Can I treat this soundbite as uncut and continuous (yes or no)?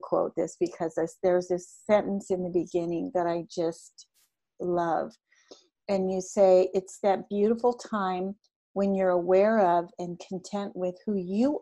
yes